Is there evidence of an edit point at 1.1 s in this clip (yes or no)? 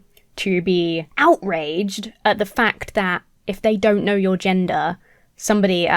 yes